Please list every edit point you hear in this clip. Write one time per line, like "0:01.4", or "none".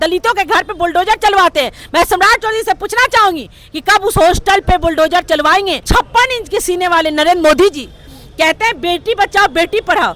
0:05.8

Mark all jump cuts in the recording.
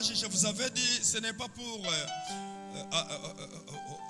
none

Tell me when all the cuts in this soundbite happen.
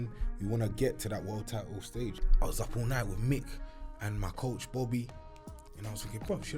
0:02.2

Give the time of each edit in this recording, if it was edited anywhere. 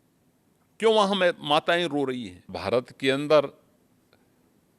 0:02.6

